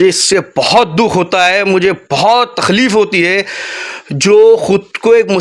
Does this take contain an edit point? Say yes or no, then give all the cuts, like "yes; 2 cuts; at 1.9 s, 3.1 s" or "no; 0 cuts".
no; 0 cuts